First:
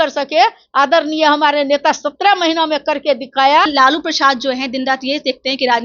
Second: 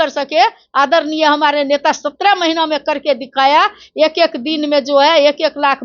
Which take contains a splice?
first; 1 cut; at 3.7 s

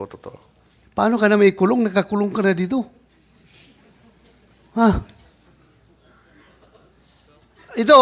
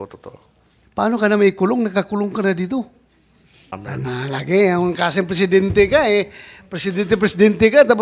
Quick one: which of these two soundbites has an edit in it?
second; 1 cut; at 3.8 s

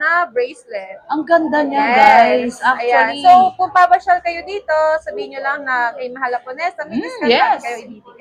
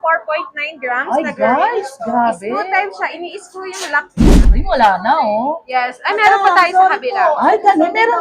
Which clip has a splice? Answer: second; 1 cut; at 4.5 s

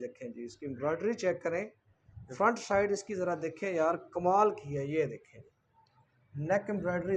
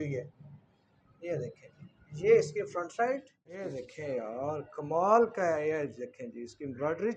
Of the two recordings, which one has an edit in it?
second; 1 cut; at 3.7 s

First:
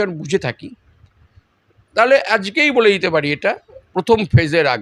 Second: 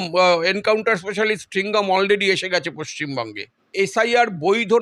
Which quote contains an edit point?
second; 1 cut; at 3.7 s

